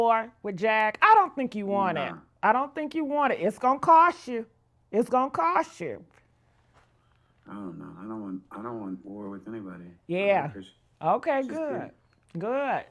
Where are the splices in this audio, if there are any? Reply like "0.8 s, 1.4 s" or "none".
none